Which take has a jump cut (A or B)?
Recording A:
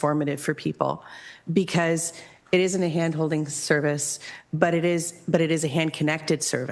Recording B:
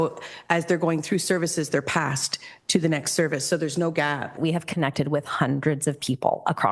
B